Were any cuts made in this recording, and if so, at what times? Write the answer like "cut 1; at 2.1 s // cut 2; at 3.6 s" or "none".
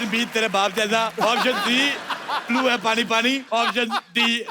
cut 1; at 1.2 s // cut 2; at 3.4 s